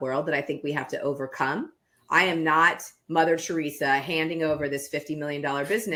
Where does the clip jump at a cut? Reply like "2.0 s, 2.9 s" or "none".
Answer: none